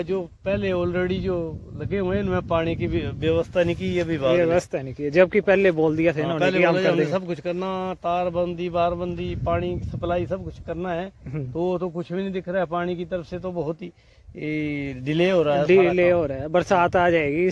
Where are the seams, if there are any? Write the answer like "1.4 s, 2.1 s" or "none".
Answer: none